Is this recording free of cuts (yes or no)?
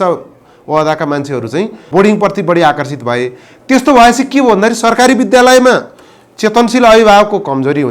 no